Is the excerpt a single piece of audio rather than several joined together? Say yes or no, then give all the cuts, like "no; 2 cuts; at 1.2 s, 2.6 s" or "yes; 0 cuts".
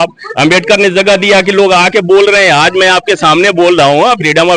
yes; 0 cuts